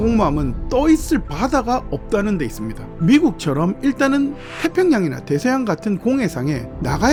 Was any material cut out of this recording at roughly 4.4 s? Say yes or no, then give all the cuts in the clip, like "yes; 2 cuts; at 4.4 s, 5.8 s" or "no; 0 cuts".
no; 0 cuts